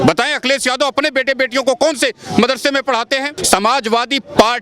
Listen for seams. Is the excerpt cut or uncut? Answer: cut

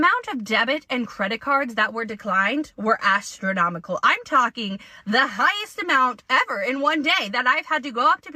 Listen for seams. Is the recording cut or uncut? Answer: uncut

